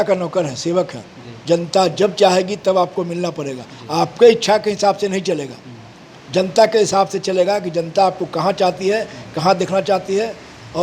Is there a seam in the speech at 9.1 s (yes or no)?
no